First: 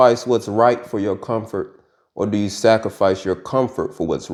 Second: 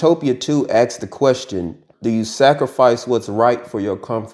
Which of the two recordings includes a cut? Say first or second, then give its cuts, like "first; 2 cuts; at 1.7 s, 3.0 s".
second; 1 cut; at 1.9 s